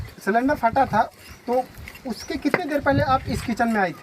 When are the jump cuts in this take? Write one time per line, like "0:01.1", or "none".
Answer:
none